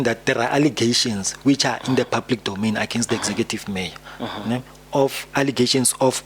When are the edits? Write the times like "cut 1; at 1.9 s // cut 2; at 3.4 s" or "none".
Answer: none